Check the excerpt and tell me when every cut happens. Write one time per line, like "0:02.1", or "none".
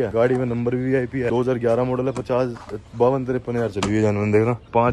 none